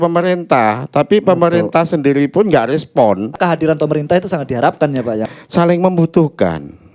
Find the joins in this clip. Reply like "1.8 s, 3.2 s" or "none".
3.3 s, 5.2 s